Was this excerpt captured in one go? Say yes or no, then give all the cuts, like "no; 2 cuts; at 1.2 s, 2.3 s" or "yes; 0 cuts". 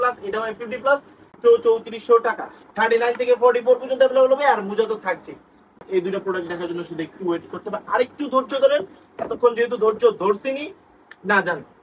no; 2 cuts; at 1.3 s, 5.8 s